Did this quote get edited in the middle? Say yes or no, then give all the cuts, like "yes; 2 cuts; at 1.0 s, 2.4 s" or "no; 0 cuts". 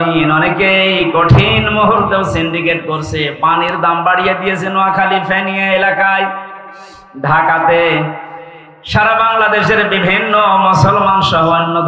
no; 0 cuts